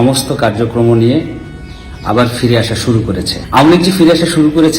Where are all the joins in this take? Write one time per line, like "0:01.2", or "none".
0:03.4